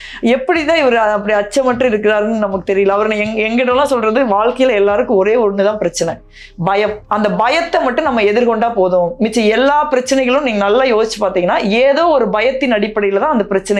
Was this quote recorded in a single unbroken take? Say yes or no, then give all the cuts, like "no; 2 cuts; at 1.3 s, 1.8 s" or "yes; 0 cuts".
yes; 0 cuts